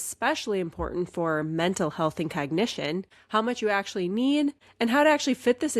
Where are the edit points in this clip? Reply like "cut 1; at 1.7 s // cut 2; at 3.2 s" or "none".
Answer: cut 1; at 3.1 s // cut 2; at 4.6 s